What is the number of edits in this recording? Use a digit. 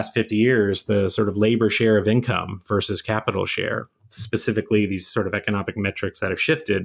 0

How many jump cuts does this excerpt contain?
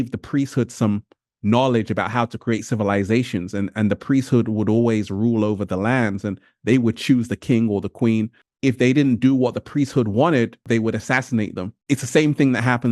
3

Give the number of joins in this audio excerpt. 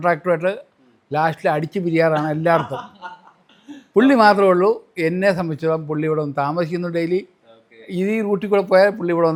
0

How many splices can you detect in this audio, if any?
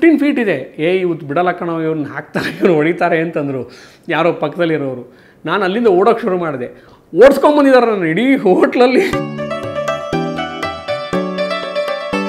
1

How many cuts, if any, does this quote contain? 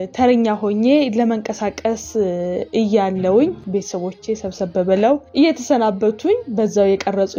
3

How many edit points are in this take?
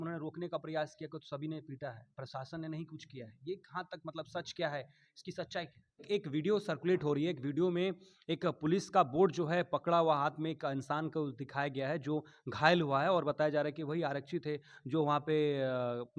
1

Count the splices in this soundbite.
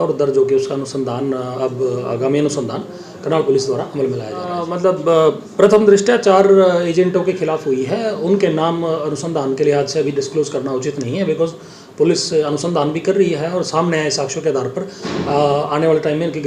1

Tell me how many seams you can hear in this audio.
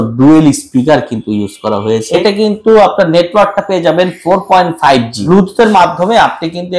2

